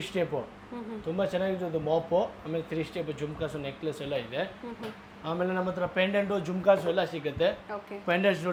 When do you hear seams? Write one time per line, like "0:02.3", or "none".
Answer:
none